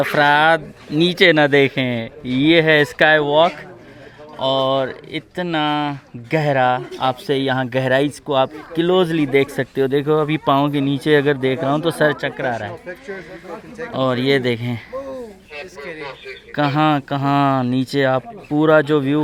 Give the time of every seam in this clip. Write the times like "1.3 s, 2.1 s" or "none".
none